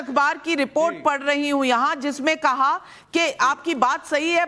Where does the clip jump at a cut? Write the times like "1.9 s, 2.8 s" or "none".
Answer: 2.2 s